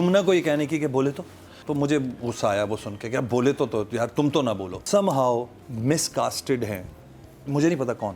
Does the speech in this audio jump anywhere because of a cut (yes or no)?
yes